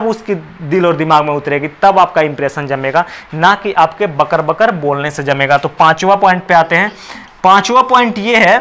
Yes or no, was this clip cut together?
no